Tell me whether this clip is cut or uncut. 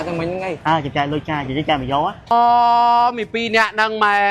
cut